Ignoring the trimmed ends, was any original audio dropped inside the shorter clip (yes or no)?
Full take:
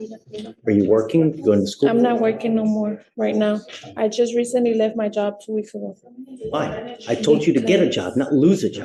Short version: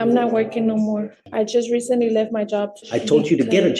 yes